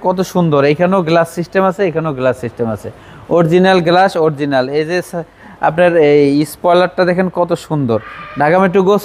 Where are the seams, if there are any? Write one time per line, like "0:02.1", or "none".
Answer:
none